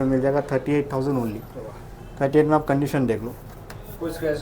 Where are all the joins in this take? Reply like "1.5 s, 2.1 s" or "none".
none